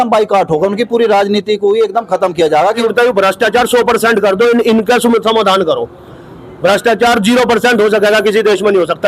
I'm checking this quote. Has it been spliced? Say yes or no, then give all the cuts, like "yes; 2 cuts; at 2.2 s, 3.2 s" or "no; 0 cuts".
yes; 1 cut; at 2.8 s